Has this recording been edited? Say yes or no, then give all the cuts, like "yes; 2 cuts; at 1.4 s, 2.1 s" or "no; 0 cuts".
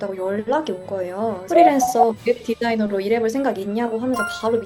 no; 0 cuts